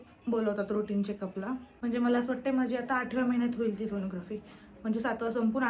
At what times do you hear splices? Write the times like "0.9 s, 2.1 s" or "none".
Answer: 1.7 s